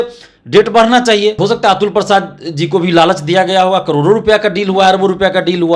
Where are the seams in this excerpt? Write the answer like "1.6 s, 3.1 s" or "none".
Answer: 1.4 s